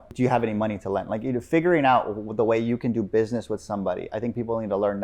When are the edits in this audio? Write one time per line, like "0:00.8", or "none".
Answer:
none